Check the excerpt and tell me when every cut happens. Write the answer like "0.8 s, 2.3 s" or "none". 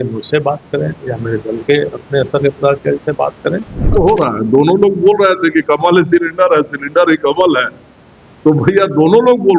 3.7 s